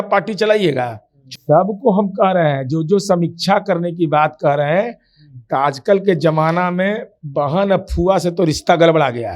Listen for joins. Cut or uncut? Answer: cut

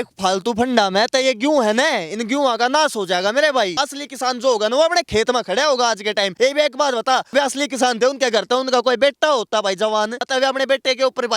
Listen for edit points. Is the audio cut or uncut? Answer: cut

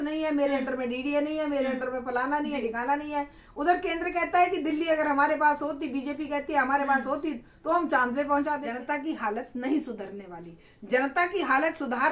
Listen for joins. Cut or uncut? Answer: cut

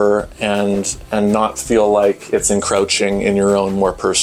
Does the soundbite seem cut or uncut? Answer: uncut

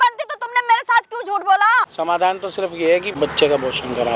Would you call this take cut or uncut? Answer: cut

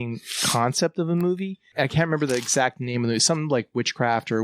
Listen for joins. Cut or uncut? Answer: cut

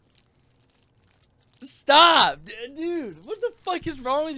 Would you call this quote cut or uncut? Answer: uncut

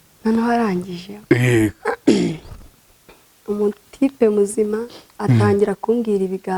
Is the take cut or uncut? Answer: uncut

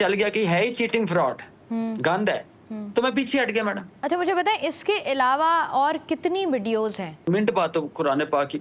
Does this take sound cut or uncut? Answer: cut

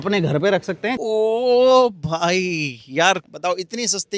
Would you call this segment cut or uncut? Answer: cut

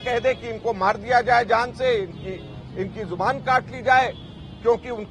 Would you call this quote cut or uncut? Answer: uncut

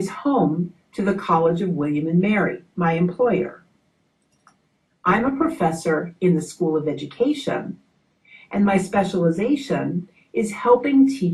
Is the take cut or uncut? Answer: uncut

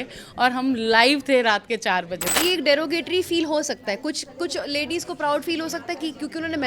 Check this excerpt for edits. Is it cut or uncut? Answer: cut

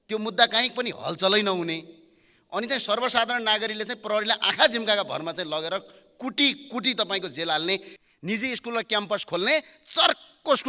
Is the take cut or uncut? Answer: cut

